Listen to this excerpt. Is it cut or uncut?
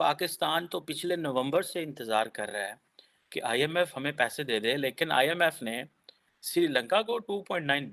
uncut